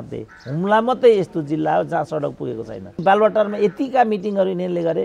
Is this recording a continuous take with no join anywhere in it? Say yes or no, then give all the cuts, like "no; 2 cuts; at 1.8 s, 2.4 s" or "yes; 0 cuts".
no; 1 cut; at 3.0 s